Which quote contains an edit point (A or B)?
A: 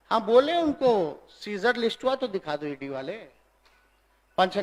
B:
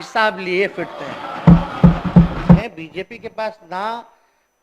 B